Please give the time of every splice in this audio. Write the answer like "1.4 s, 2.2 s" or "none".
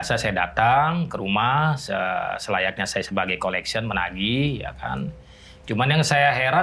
none